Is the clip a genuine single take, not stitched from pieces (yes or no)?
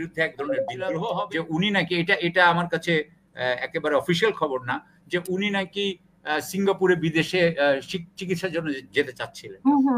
no